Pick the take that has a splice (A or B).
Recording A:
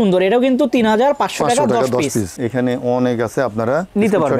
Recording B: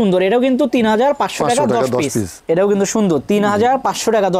A